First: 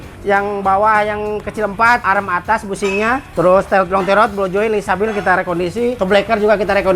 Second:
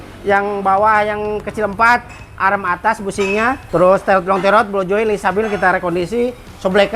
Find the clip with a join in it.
first; 2 cuts; at 2.0 s, 6.0 s

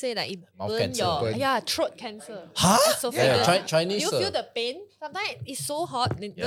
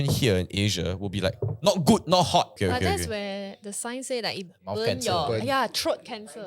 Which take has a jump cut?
second; 1 cut; at 2.6 s

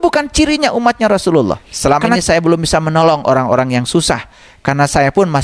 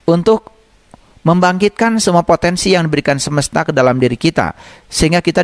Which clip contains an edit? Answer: first; 1 cut; at 1.7 s

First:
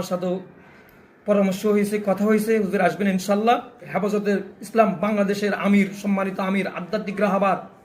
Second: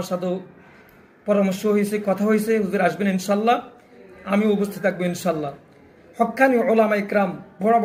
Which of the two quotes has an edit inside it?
first; 1 cut; at 3.9 s

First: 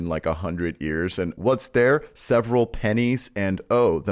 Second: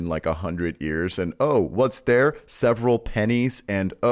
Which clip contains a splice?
first; 1 cut; at 1.4 s

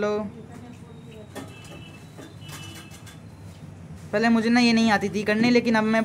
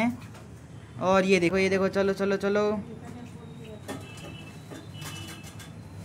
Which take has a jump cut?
second; 1 cut; at 1.5 s

